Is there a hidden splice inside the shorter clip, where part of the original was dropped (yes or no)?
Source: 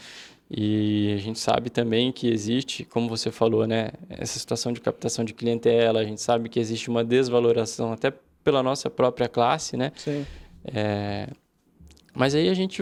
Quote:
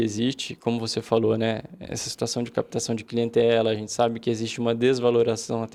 no